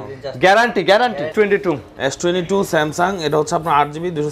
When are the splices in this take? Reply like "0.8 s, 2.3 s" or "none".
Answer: 1.3 s